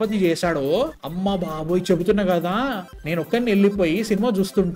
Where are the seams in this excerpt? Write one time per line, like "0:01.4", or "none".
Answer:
0:02.9